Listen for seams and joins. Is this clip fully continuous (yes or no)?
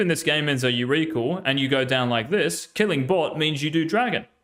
yes